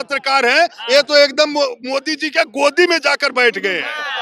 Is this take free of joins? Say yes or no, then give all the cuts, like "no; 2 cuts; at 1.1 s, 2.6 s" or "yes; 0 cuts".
yes; 0 cuts